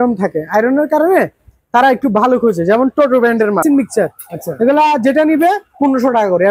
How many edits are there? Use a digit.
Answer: 1